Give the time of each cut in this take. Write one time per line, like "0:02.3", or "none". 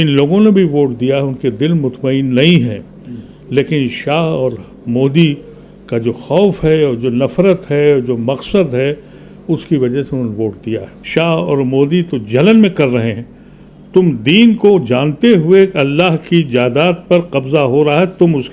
0:11.0